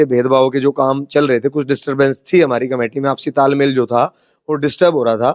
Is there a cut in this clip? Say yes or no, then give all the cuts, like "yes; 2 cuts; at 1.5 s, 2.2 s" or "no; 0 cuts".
no; 0 cuts